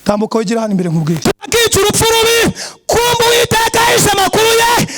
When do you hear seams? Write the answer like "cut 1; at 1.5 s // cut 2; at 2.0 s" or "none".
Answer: cut 1; at 1.2 s